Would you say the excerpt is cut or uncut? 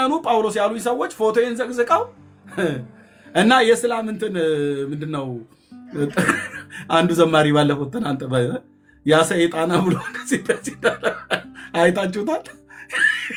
uncut